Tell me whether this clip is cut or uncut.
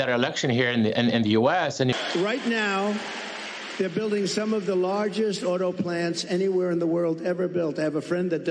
cut